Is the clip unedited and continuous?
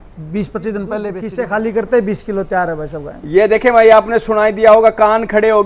no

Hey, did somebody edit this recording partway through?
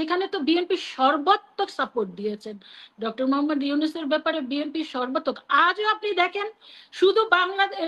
no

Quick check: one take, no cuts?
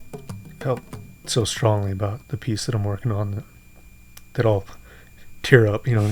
yes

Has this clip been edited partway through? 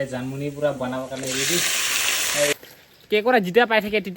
yes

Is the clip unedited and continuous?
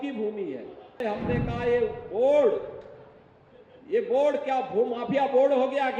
no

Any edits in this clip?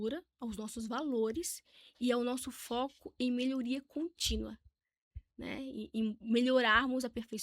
no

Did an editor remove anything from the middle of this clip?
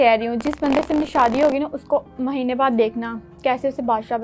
no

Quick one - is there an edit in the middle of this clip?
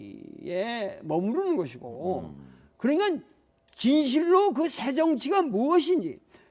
yes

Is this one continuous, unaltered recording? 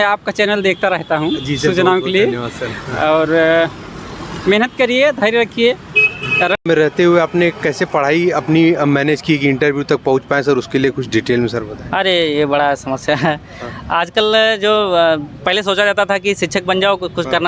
no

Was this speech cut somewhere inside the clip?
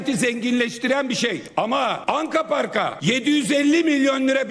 yes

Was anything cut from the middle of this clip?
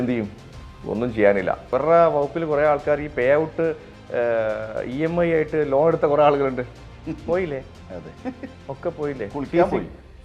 yes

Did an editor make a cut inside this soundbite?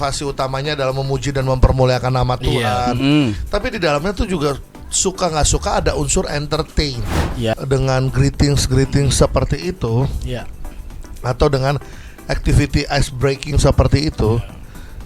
yes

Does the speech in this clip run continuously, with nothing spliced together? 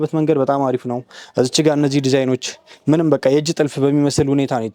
yes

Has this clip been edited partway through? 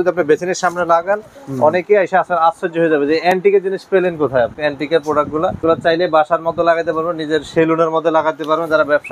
yes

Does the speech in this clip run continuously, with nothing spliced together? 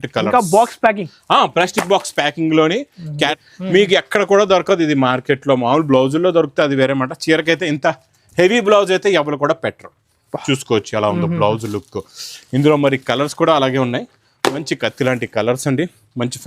no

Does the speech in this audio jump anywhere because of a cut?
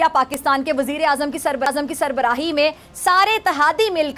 no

